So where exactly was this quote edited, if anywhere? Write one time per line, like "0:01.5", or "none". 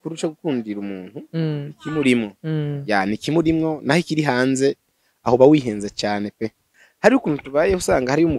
0:06.7